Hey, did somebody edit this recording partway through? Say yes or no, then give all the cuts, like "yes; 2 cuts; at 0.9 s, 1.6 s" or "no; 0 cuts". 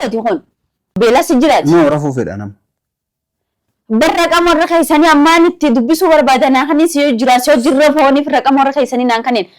yes; 1 cut; at 1.0 s